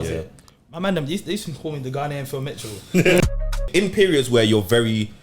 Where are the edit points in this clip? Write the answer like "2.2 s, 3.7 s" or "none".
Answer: 3.2 s